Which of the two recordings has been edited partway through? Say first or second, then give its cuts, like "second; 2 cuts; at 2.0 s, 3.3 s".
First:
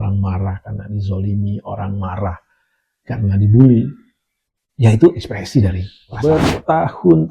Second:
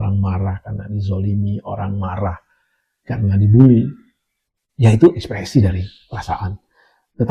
first; 1 cut; at 6.1 s